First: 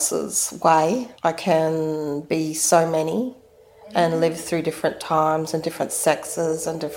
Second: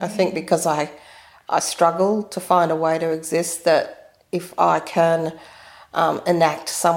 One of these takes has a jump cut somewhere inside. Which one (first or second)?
first